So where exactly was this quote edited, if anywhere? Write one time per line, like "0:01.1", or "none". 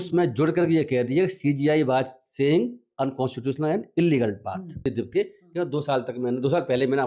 0:04.8